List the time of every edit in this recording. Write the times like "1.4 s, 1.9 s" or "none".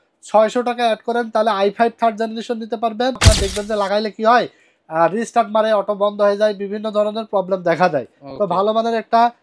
3.2 s